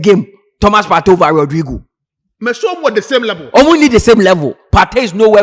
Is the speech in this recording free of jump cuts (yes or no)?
yes